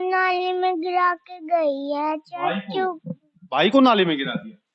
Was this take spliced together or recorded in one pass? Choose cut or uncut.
uncut